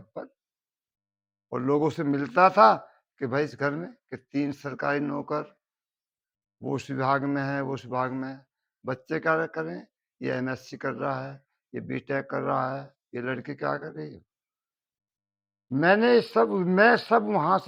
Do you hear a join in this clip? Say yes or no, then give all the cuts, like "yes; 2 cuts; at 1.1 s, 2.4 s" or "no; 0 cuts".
no; 0 cuts